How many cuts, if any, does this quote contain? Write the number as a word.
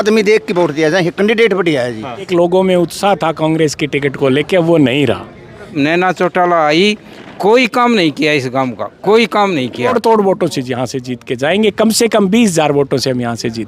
three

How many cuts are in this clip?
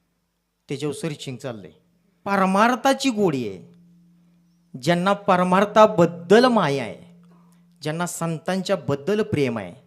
one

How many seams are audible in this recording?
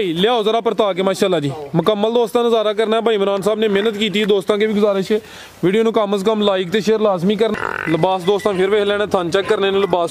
one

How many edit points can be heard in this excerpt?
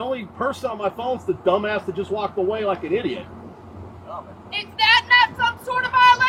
zero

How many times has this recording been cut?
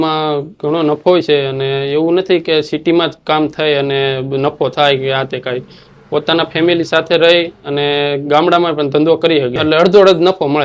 one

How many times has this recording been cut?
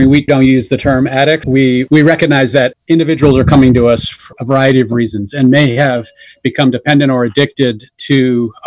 one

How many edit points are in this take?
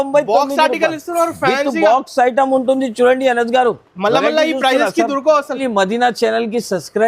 one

